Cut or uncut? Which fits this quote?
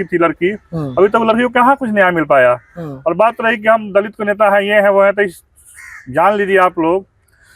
uncut